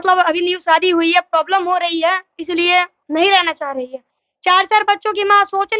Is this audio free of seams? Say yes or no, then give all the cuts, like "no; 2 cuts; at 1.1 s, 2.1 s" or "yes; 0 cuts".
yes; 0 cuts